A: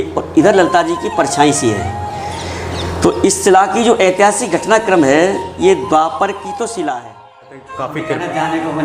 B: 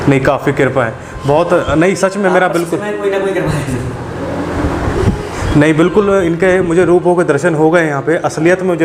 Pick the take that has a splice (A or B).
A